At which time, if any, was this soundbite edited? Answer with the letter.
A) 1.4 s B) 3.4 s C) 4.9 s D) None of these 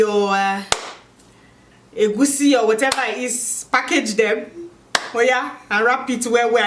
D